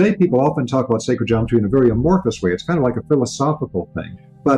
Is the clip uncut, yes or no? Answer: yes